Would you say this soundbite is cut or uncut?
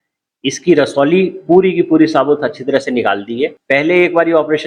cut